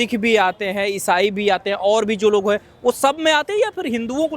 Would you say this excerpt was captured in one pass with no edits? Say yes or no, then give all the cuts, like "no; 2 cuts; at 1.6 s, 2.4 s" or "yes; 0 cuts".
yes; 0 cuts